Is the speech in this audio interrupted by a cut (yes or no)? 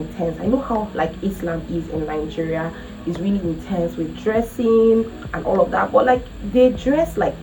no